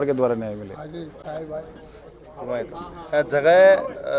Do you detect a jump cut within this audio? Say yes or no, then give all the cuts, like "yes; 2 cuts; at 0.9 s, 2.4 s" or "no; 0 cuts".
no; 0 cuts